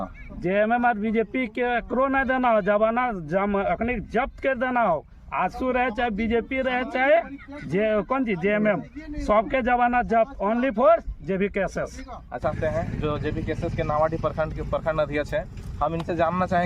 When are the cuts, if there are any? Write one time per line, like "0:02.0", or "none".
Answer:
0:12.4